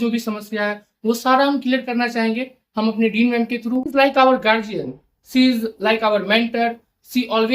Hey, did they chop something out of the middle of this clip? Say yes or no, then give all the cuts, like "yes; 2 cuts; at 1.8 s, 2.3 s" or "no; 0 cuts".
yes; 1 cut; at 3.9 s